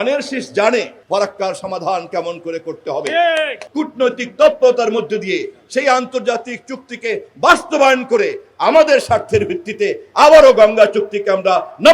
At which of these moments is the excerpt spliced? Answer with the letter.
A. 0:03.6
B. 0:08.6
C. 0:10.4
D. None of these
A